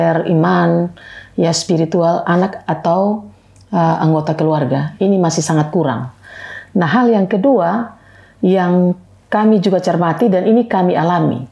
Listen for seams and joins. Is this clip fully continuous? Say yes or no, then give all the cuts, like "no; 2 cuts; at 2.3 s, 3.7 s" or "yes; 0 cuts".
yes; 0 cuts